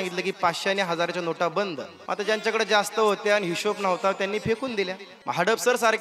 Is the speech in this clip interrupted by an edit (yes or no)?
yes